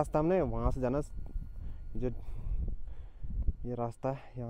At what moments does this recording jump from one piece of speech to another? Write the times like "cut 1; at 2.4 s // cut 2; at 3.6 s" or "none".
none